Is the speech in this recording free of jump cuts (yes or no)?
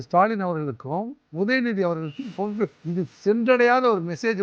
no